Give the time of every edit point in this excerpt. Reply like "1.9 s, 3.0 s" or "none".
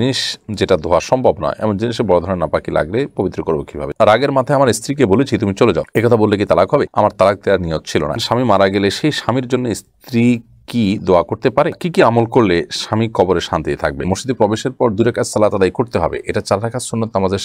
3.9 s, 8.2 s, 14.1 s